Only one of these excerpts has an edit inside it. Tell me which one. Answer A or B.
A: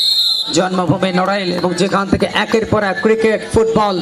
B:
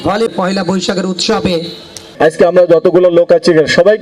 B